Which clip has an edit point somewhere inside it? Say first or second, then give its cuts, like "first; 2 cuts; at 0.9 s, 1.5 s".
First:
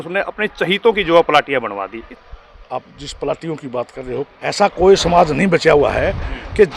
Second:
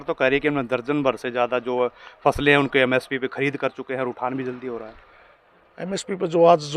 first; 2 cuts; at 2.0 s, 4.3 s